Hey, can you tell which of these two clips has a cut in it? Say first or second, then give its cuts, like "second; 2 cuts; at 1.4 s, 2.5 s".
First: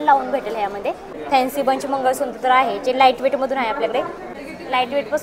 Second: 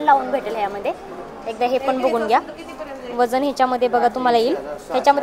first; 2 cuts; at 1.1 s, 4.2 s